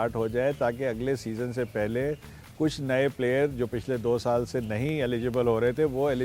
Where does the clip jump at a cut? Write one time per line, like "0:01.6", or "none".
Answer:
none